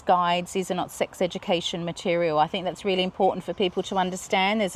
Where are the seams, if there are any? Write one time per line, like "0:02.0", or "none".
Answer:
none